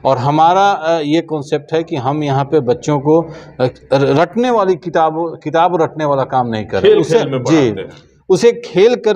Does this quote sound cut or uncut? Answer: uncut